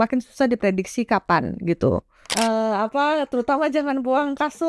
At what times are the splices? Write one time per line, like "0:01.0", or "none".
0:02.2